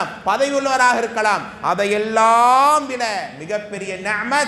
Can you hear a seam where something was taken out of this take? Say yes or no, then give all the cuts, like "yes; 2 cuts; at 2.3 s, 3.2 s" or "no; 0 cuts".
no; 0 cuts